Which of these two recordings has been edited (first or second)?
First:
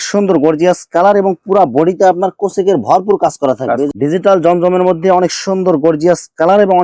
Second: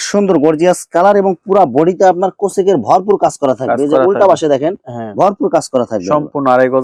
first